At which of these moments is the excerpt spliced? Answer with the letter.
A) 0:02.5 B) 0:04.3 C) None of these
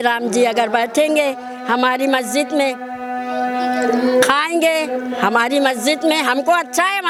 C